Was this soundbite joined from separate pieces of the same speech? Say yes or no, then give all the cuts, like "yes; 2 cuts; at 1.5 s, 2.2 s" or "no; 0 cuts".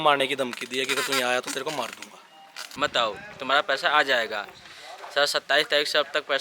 yes; 1 cut; at 2.6 s